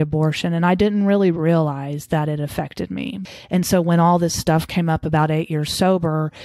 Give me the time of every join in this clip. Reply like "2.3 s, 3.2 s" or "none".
3.2 s